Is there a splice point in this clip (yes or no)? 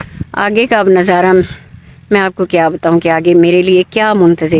no